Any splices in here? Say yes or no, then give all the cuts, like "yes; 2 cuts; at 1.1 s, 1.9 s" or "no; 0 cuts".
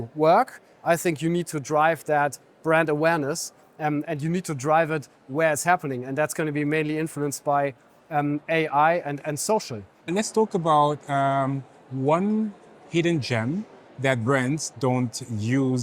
no; 0 cuts